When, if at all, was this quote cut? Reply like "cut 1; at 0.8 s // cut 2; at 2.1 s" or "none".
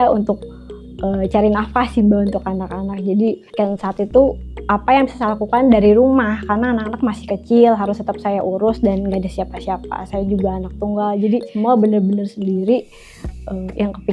cut 1; at 3.5 s // cut 2; at 11.5 s